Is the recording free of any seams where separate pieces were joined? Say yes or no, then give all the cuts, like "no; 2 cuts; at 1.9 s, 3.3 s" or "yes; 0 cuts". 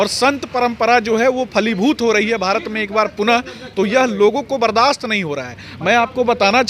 yes; 0 cuts